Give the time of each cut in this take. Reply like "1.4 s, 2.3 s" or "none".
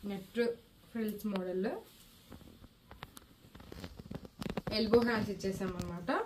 none

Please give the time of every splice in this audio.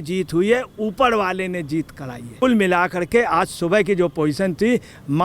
2.4 s

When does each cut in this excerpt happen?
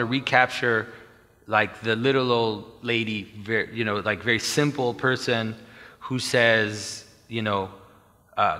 none

